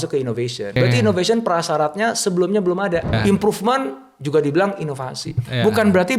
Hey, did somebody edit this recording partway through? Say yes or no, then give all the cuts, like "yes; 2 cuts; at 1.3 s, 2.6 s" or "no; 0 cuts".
yes; 2 cuts; at 0.8 s, 3.2 s